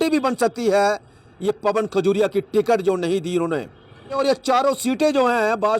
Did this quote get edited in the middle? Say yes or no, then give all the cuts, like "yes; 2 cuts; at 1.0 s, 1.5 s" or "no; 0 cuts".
yes; 1 cut; at 4.1 s